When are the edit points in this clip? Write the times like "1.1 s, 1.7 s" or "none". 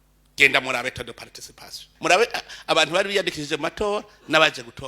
1.8 s

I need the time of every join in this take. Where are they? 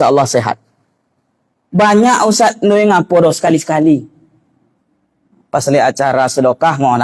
none

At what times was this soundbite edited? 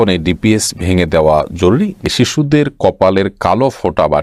2.1 s

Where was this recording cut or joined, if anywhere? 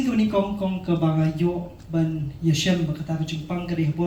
none

